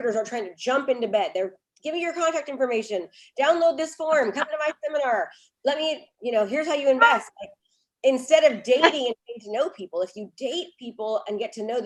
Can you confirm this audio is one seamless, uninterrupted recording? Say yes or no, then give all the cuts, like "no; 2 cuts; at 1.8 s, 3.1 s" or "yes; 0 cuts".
yes; 0 cuts